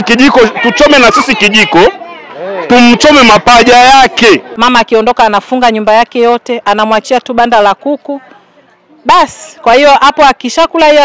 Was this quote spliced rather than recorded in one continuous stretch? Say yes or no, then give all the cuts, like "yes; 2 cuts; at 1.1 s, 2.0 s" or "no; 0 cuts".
yes; 1 cut; at 4.5 s